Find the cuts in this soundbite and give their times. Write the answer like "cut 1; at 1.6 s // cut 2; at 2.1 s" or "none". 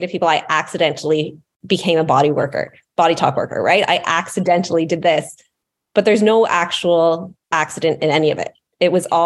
cut 1; at 1.5 s